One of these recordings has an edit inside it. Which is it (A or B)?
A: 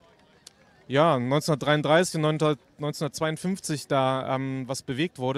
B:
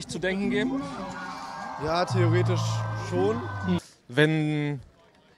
B